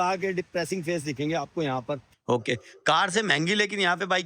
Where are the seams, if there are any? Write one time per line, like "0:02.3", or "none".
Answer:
0:02.1